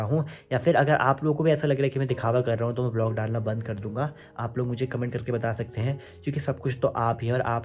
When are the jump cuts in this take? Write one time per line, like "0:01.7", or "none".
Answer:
none

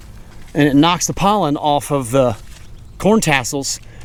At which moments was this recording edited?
none

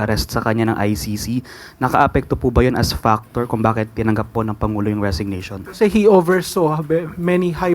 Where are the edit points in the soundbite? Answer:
0:05.6

